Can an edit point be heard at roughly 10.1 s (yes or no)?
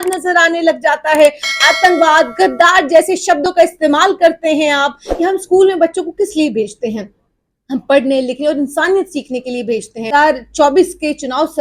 yes